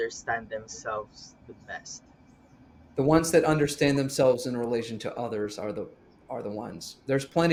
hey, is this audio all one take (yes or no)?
yes